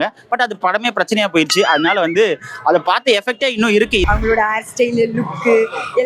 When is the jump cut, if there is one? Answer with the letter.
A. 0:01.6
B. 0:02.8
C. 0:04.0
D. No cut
C